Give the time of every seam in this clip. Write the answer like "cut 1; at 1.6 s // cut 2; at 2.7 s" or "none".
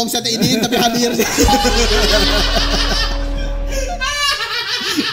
none